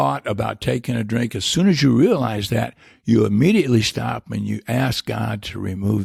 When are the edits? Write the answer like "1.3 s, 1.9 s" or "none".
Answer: none